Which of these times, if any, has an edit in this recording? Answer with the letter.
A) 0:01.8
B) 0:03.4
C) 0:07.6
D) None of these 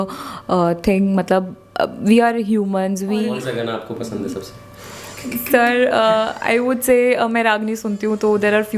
B